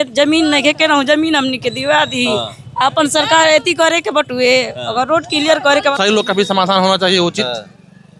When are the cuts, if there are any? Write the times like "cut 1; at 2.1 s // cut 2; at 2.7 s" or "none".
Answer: cut 1; at 6.0 s